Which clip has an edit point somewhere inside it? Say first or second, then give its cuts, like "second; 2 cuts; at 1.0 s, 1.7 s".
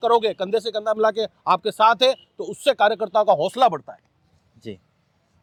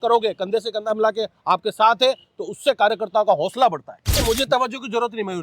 second; 1 cut; at 4.2 s